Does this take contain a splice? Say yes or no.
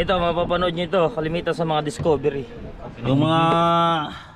yes